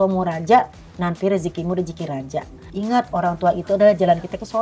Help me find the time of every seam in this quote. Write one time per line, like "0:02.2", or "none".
0:02.6